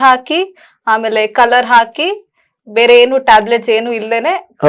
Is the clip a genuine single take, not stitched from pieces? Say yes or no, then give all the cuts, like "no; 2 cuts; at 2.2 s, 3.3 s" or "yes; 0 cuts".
yes; 0 cuts